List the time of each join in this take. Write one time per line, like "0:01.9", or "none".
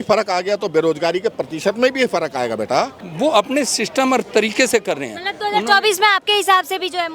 0:03.0